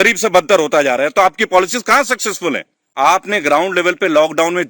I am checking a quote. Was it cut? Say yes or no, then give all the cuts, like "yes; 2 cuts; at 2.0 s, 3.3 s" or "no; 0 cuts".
yes; 1 cut; at 2.8 s